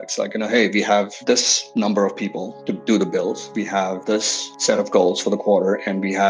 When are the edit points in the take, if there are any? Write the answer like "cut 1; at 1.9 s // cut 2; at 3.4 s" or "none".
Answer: none